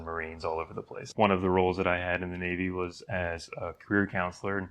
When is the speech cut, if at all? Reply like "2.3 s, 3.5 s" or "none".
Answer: 1.0 s